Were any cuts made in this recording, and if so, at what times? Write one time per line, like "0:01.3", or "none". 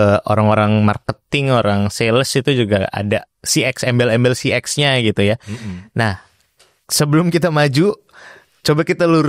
none